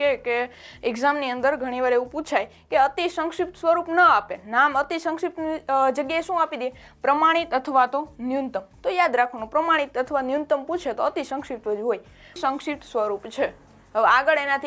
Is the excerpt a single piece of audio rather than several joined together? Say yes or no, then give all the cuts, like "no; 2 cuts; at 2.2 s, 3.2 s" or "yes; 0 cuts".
no; 1 cut; at 12.4 s